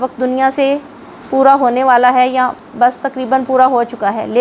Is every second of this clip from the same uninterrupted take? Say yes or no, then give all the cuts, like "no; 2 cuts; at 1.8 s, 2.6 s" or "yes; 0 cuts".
yes; 0 cuts